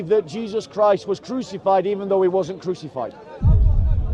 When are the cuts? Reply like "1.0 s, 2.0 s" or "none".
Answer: none